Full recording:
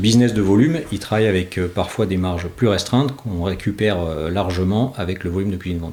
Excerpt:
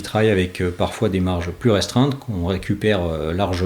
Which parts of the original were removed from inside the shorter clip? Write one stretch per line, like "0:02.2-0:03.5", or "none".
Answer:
none